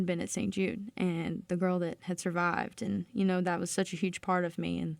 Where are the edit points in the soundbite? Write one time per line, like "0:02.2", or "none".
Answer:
none